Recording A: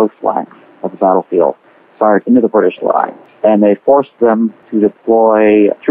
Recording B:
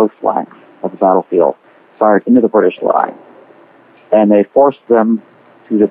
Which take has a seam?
A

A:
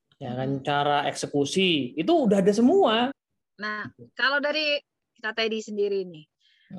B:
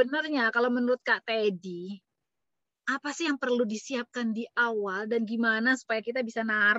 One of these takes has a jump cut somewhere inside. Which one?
A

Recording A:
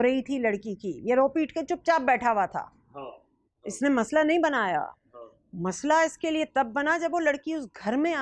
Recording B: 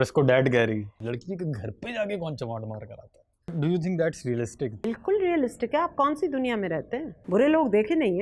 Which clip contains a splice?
B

